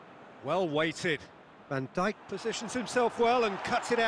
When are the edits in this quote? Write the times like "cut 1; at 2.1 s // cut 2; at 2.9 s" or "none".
none